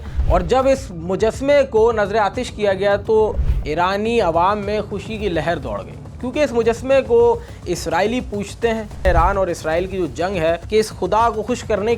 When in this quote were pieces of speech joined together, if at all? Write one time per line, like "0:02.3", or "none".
0:09.1
0:10.6